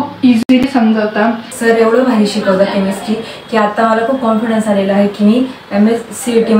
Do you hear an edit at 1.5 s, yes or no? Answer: yes